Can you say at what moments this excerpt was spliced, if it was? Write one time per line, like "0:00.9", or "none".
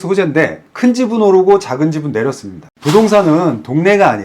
0:02.6